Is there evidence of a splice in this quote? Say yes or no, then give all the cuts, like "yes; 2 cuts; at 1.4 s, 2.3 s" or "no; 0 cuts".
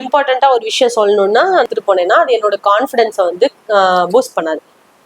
yes; 1 cut; at 1.6 s